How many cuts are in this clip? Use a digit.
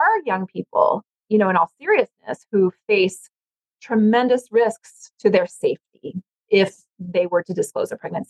1